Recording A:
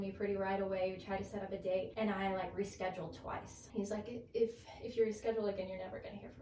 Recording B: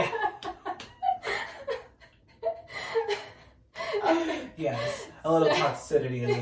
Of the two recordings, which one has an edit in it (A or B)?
A